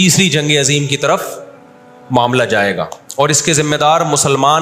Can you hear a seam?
no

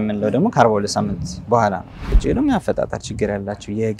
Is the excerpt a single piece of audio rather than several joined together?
no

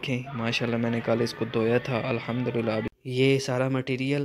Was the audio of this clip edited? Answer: yes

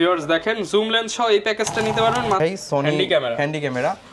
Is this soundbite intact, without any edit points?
no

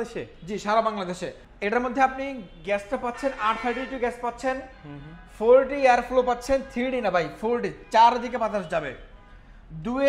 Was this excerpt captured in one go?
yes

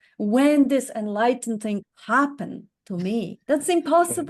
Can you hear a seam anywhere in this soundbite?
yes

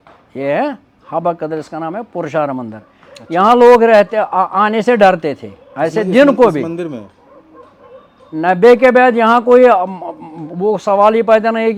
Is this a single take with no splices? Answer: yes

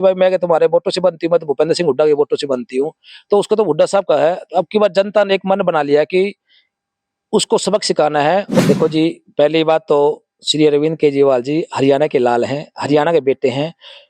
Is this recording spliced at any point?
yes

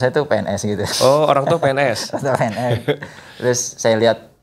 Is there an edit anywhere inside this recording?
no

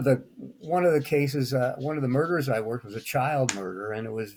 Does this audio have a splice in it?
no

